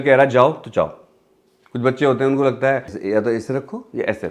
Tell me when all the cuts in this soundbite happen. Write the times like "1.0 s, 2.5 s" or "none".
3.0 s